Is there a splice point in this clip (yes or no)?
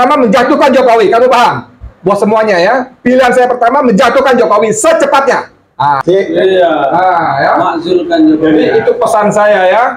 yes